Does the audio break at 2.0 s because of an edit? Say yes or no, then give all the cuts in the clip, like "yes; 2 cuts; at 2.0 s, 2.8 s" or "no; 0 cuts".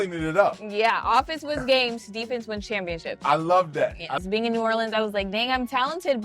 no; 1 cut; at 4.2 s